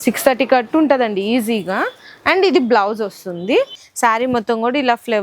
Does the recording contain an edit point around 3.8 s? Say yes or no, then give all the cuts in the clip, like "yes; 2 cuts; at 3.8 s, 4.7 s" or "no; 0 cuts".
yes; 1 cut; at 3.8 s